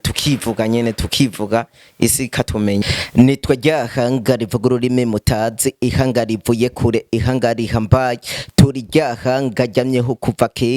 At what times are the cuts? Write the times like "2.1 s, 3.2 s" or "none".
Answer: 2.8 s